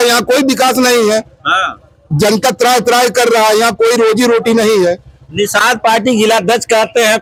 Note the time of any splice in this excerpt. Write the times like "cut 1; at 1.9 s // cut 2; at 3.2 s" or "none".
none

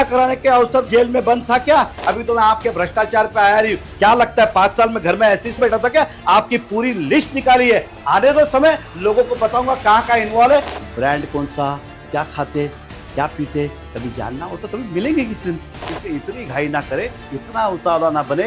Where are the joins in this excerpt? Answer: cut 1; at 0.9 s // cut 2; at 2.0 s // cut 3; at 5.6 s // cut 4; at 10.7 s // cut 5; at 15.8 s

